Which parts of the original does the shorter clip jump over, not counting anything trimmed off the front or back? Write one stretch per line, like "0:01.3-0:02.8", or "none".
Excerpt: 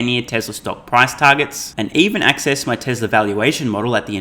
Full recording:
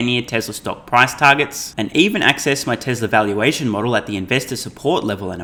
none